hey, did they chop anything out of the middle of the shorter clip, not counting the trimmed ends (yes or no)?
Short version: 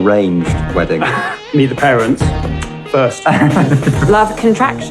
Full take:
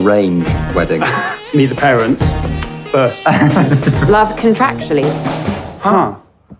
no